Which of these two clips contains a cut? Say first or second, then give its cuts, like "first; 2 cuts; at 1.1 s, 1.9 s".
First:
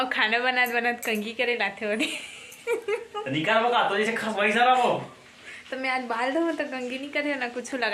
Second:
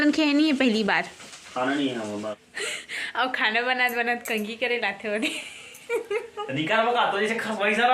second; 1 cut; at 2.3 s